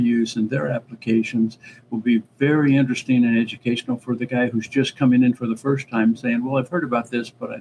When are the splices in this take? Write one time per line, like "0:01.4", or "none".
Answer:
none